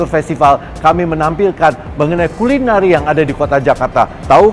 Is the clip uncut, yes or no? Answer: yes